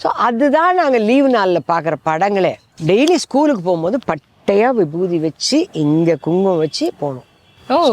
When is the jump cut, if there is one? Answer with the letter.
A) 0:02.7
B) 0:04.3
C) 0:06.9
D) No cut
A